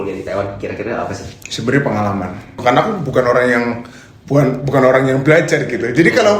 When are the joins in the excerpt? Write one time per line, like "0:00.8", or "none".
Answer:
0:02.6